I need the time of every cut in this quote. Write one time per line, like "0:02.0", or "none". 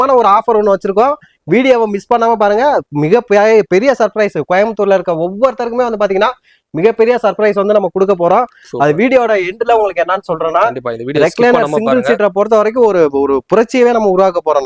none